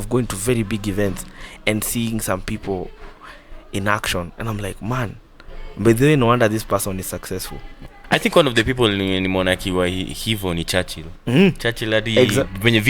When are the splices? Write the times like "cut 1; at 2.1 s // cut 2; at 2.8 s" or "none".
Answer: cut 1; at 7.9 s